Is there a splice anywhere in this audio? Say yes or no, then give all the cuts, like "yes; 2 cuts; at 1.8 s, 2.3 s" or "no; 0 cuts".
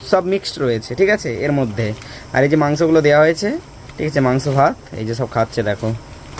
no; 0 cuts